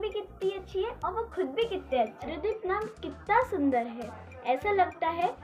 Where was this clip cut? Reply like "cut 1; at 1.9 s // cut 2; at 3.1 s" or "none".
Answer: cut 1; at 2.3 s